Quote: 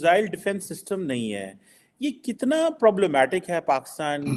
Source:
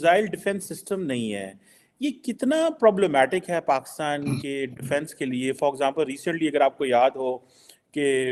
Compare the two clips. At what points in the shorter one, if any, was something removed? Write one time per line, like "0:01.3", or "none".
none

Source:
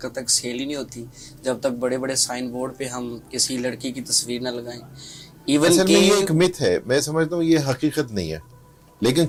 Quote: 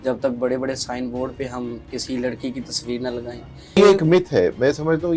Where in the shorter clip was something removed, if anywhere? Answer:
0:03.8

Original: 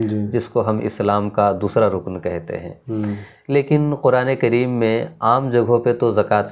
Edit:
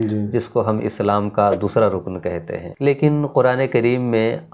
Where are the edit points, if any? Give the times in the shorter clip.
0:02.6

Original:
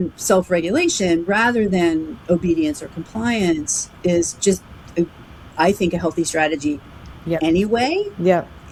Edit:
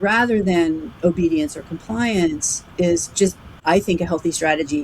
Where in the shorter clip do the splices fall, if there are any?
0:03.5

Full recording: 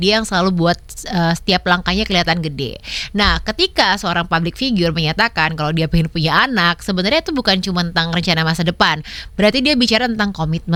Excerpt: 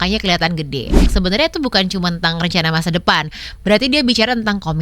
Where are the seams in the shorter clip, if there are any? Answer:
0:01.1

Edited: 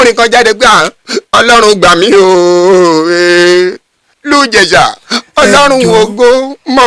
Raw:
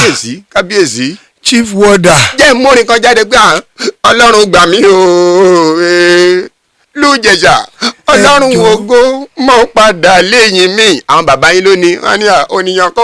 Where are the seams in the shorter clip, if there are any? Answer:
none

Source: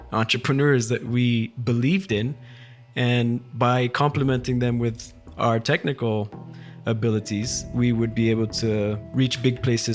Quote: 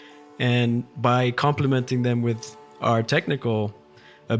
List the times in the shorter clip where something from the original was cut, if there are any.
none

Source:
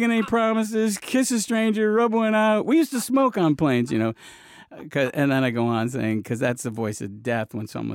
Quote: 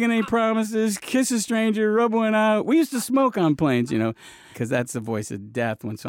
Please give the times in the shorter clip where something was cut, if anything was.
0:04.6

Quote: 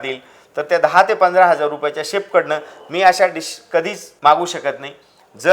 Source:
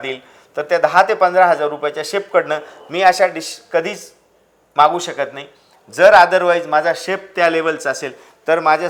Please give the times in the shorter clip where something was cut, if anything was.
0:04.0

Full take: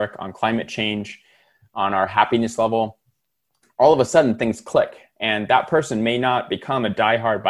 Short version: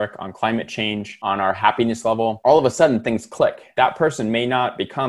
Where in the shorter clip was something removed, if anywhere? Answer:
0:01.1
0:02.4
0:03.7

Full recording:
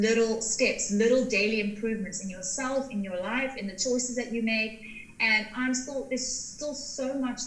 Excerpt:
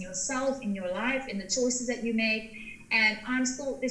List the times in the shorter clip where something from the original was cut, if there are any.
none

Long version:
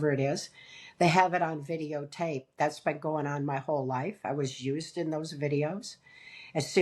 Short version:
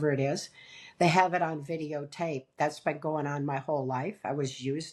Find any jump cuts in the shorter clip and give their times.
none

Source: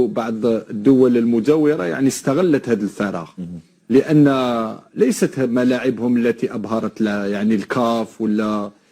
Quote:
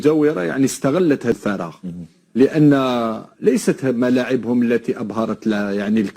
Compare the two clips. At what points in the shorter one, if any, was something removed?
0:01.4

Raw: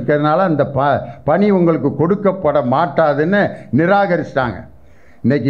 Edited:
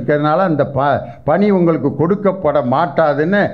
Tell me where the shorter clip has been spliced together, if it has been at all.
none

